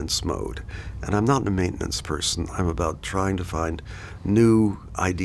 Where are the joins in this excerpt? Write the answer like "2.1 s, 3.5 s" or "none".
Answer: none